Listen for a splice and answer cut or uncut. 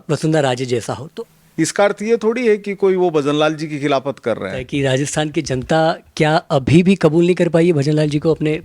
cut